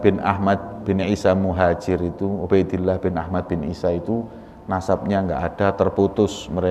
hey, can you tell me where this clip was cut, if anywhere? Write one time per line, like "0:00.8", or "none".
none